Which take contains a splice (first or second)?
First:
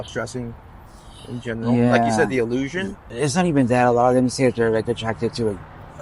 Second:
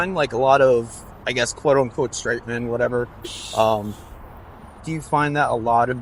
first